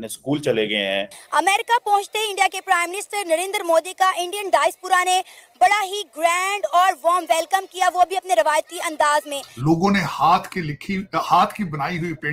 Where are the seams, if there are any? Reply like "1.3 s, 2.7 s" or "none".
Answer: 1.2 s, 9.4 s